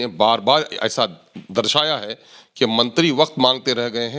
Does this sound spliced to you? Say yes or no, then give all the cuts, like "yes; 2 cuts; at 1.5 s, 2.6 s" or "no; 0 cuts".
no; 0 cuts